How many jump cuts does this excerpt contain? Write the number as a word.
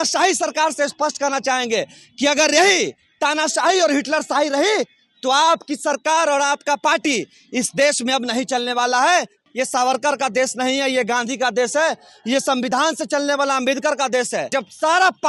two